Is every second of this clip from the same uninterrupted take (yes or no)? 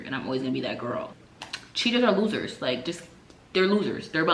yes